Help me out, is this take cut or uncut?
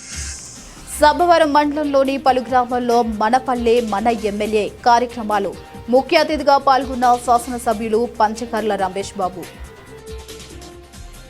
cut